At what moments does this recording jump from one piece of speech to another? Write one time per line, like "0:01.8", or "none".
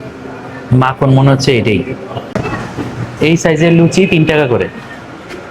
0:02.2